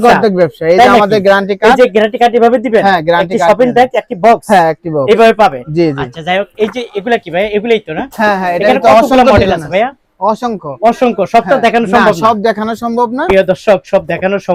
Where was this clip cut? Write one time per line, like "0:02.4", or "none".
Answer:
none